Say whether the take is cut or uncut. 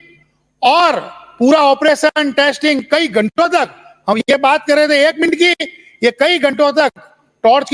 uncut